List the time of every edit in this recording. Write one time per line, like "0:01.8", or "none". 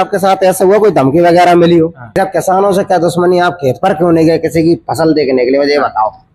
0:02.2

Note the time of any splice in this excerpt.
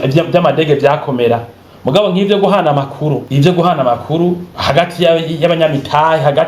0:03.2
0:04.5

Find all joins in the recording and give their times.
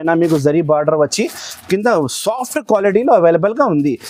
none

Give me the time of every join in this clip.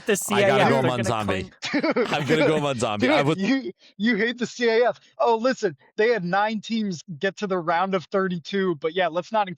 0:07.0

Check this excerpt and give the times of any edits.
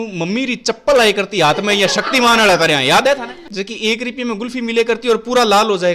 0:03.5

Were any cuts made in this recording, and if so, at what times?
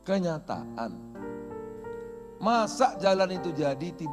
0:01.2
0:02.4

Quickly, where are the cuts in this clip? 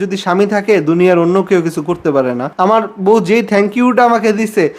0:02.5

